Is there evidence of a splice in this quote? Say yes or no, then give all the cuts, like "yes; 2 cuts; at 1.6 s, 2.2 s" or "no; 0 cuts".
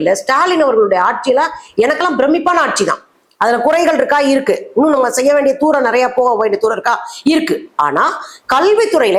no; 0 cuts